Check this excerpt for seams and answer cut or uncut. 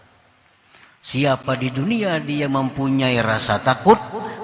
uncut